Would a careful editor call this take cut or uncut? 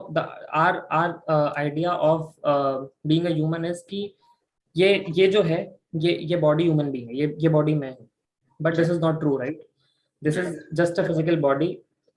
uncut